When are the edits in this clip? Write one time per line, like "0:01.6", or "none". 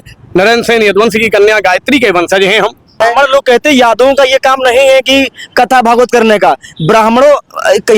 0:03.0